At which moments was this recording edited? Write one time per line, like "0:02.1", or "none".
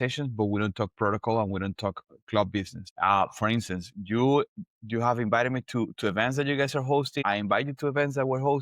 0:02.8
0:07.2